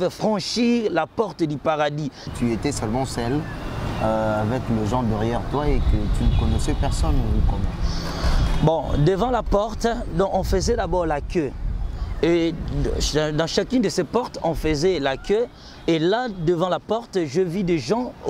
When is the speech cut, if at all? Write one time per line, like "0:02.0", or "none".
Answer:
0:02.3